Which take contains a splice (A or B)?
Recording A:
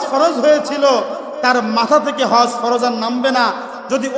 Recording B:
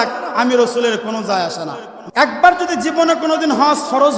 B